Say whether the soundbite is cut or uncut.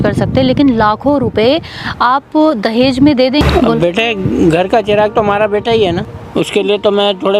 cut